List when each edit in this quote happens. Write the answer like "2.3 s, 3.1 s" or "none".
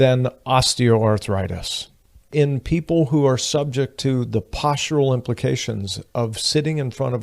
2.3 s